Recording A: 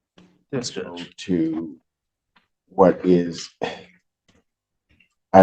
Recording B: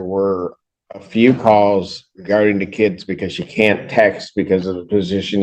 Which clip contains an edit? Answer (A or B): A